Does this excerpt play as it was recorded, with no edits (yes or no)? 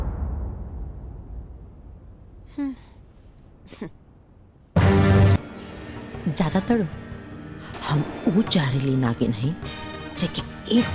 no